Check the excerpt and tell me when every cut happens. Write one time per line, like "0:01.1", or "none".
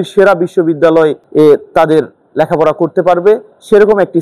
0:01.2